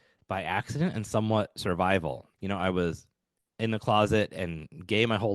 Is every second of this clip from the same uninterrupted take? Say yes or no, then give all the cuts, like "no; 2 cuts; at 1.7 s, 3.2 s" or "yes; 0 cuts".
no; 1 cut; at 2.3 s